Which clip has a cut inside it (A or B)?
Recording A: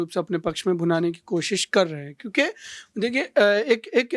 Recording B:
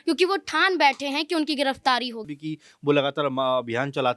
B